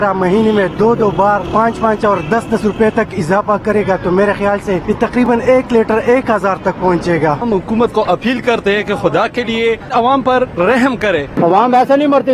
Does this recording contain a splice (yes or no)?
yes